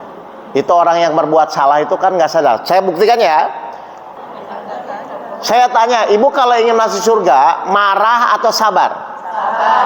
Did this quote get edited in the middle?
yes; 1 cut; at 4.0 s

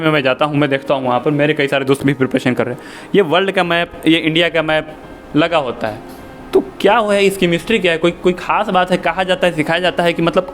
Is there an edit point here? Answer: no; 0 cuts

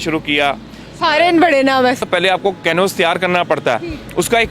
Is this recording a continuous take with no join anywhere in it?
no; 1 cut; at 2.0 s

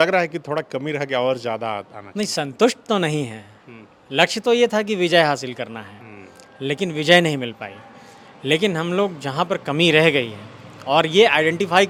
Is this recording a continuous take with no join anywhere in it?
yes; 0 cuts

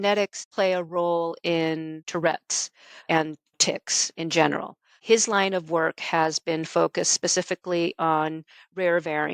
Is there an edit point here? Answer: no; 0 cuts

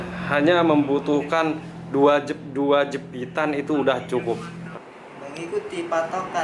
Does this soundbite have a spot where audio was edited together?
yes; 1 cut; at 4.6 s

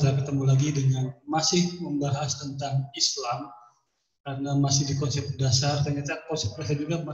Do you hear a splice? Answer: no; 0 cuts

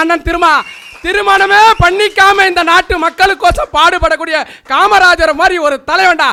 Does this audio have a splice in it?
no; 0 cuts

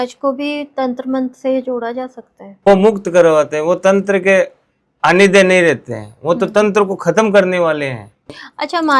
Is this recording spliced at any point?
no; 0 cuts

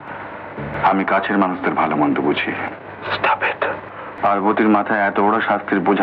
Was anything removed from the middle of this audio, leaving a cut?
yes; 1 cut; at 4.1 s

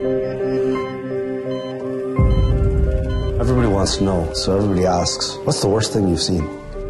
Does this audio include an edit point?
yes; 1 cut; at 2.5 s

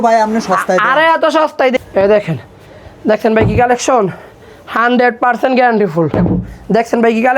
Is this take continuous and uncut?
no; 2 cuts; at 1.7 s, 6.1 s

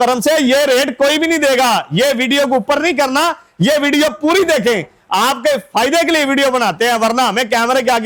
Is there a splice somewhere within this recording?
no; 0 cuts

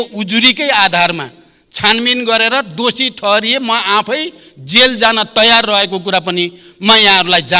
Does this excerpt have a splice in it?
no; 0 cuts

